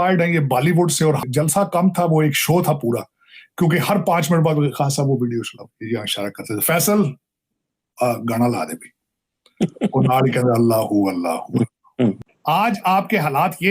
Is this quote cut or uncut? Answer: cut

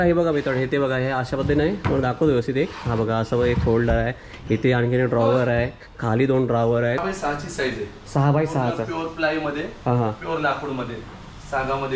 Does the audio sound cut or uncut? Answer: cut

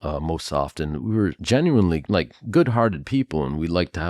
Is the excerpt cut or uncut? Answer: cut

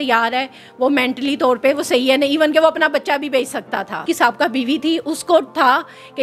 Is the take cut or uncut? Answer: cut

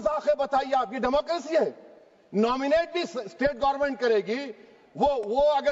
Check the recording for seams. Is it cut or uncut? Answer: uncut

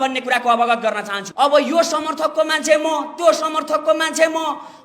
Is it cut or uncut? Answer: cut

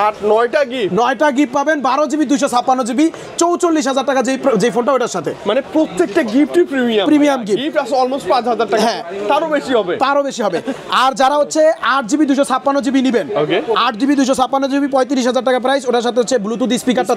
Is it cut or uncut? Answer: uncut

